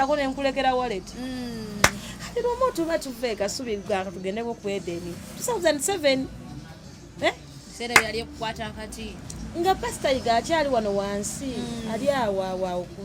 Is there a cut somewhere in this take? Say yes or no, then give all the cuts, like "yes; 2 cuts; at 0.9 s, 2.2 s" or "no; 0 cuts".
no; 0 cuts